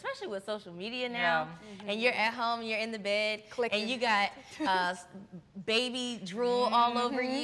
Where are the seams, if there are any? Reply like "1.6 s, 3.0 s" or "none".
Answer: none